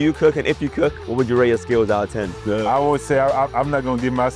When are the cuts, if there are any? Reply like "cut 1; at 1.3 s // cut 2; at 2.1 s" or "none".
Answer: cut 1; at 1.0 s // cut 2; at 2.3 s